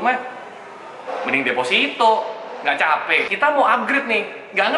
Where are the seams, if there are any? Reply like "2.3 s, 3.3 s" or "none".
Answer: 3.3 s